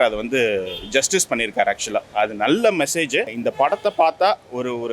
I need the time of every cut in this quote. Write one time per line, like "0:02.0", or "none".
0:03.3